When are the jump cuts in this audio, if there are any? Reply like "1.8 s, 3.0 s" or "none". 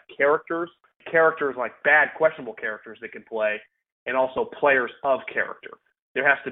1.0 s